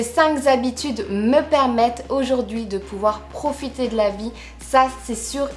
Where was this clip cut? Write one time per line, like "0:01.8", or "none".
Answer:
none